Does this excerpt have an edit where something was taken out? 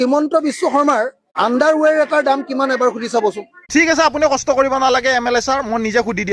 yes; 1 cut; at 3.6 s

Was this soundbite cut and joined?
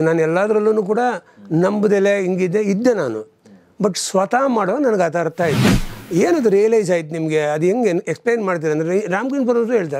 yes; 1 cut; at 5.9 s

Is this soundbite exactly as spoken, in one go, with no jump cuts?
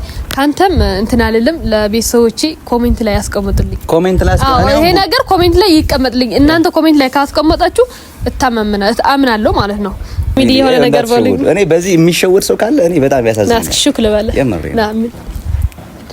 no; 1 cut; at 10.4 s

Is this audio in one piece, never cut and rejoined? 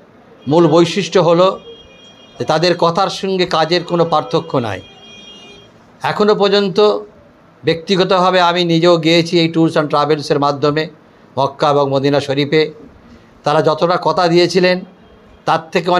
yes; 0 cuts

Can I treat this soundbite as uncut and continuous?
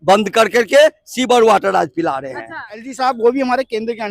no; 1 cut; at 2.9 s

